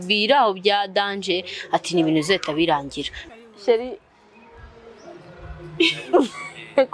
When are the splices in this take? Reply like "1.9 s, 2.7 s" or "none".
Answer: 3.1 s